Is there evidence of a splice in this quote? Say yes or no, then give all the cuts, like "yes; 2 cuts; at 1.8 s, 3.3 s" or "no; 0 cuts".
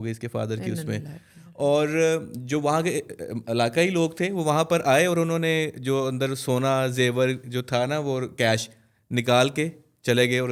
no; 0 cuts